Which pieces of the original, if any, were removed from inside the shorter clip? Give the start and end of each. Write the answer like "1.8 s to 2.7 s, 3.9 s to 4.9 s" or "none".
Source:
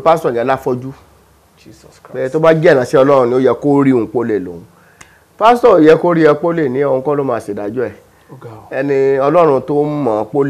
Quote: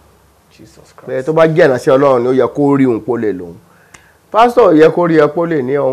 none